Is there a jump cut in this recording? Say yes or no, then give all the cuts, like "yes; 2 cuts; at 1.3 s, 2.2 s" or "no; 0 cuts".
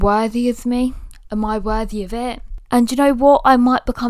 yes; 1 cut; at 2.4 s